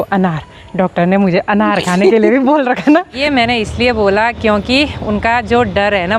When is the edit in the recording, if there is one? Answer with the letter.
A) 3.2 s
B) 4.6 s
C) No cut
A